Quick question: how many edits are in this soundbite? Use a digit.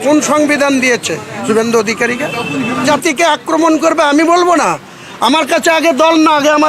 1